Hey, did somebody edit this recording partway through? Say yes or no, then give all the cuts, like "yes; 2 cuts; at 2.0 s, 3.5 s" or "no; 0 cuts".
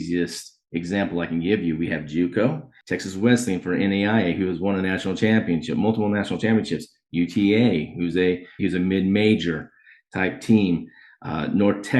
yes; 2 cuts; at 2.8 s, 8.6 s